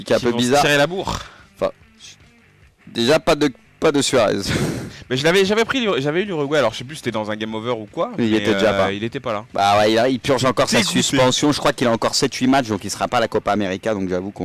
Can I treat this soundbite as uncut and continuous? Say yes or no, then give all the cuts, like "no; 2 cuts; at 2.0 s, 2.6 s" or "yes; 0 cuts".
yes; 0 cuts